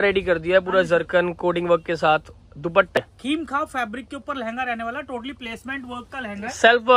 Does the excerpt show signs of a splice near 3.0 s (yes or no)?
yes